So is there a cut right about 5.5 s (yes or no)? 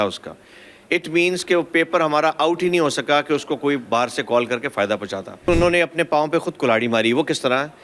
yes